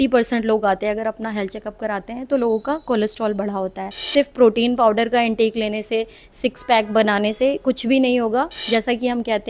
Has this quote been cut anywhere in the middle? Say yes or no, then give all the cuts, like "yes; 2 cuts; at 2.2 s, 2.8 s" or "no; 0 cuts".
yes; 2 cuts; at 4.0 s, 8.6 s